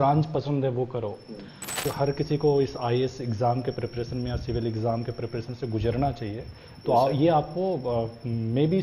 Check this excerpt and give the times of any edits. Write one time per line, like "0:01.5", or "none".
0:01.8